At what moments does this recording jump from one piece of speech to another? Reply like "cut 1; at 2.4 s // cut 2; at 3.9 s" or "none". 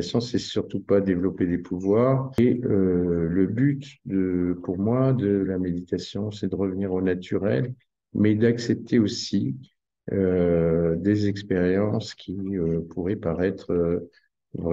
cut 1; at 2.4 s